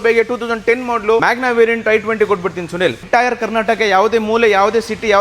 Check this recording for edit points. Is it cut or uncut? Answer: cut